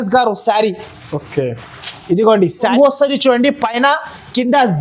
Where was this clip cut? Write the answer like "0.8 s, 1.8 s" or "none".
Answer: 2.7 s